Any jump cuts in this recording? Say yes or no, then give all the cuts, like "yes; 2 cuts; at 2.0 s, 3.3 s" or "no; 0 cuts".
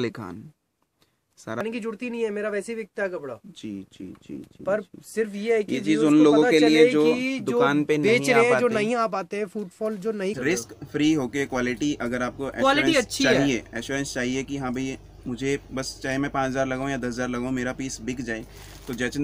yes; 2 cuts; at 1.6 s, 10.3 s